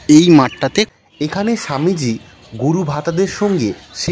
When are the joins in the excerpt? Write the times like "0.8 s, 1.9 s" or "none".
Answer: 0.9 s